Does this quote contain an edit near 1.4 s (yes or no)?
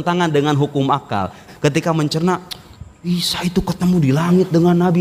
yes